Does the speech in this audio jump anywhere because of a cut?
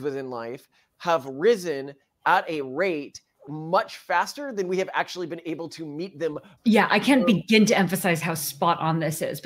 yes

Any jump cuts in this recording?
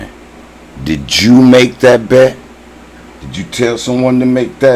no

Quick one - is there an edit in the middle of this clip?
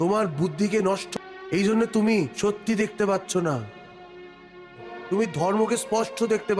yes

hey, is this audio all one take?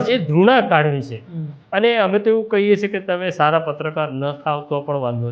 yes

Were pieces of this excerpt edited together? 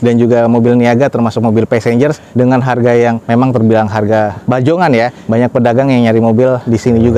no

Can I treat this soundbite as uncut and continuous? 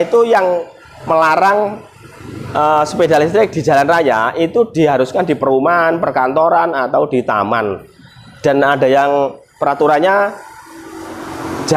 yes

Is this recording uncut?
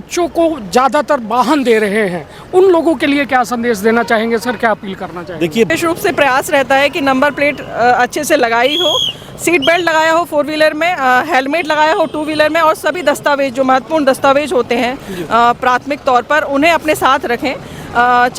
no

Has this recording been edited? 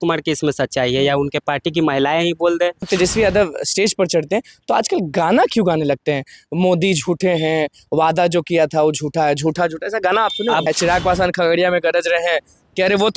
yes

